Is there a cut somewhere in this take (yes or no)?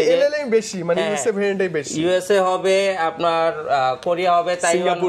no